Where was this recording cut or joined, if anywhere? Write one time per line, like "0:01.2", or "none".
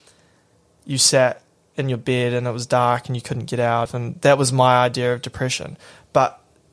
0:03.9

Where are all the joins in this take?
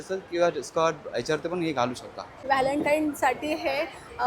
0:02.4

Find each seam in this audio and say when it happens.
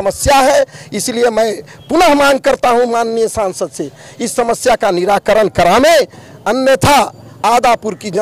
none

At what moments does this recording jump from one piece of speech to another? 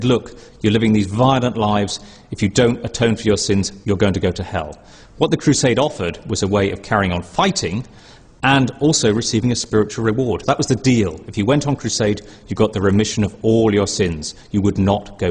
0:01.5

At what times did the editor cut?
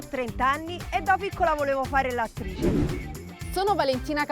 0:02.4
0:03.3

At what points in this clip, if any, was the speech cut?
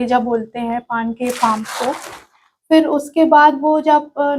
none

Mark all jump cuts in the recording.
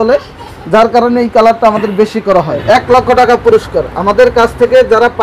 0:02.6

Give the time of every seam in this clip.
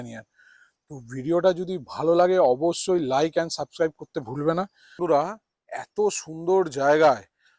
0:04.8

